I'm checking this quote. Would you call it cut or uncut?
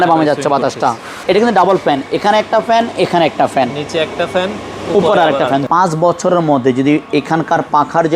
cut